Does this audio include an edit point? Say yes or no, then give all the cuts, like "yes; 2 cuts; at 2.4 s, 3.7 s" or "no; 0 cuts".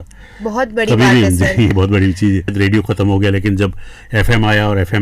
no; 0 cuts